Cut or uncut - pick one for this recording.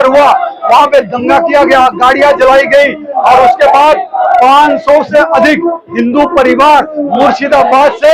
uncut